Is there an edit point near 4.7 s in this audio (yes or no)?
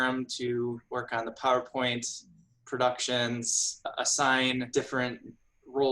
yes